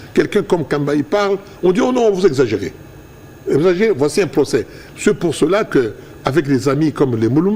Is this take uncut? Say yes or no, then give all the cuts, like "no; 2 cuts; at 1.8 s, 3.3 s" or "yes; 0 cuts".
yes; 0 cuts